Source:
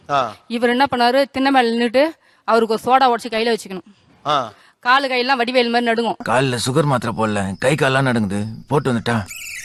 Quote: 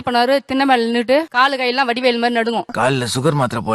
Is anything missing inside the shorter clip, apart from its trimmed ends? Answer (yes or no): yes